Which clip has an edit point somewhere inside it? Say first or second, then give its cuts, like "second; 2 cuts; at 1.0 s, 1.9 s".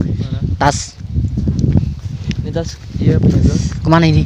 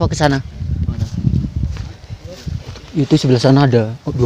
second; 1 cut; at 2.7 s